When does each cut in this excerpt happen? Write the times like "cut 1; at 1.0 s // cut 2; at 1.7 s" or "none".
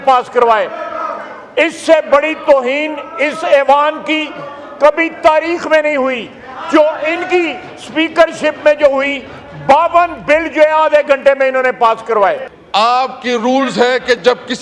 cut 1; at 12.5 s